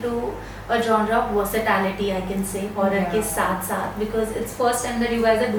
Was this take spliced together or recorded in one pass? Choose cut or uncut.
uncut